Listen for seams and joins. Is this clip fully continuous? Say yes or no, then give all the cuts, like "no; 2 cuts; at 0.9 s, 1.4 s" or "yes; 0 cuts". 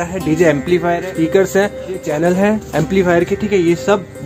no; 2 cuts; at 1.0 s, 2.1 s